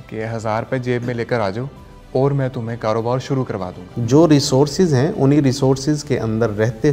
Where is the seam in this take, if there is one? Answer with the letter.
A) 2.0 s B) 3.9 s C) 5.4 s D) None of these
B